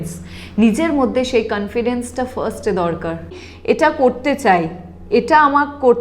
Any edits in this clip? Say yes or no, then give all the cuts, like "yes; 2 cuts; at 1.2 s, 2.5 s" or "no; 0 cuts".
yes; 1 cut; at 3.3 s